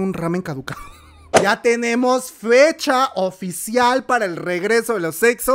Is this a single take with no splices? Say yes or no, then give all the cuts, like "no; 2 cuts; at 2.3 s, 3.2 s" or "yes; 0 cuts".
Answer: no; 1 cut; at 1.2 s